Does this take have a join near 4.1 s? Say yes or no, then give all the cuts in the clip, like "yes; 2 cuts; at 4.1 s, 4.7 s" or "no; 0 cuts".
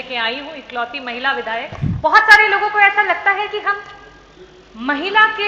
no; 1 cut; at 1.8 s